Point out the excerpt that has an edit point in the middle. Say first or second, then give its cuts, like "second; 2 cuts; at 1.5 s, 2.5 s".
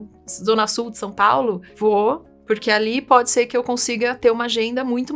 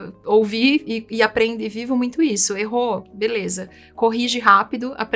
first; 1 cut; at 1.7 s